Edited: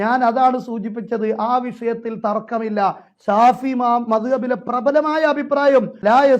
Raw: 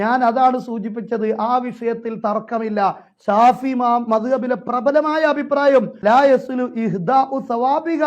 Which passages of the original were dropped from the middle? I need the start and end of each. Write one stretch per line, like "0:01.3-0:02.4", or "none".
none